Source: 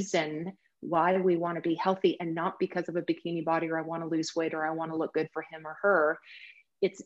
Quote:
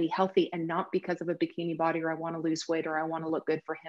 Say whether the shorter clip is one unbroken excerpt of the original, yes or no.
yes